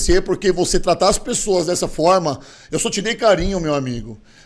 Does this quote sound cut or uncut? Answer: uncut